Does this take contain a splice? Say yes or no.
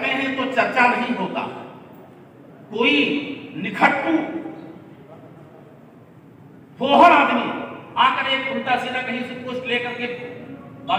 no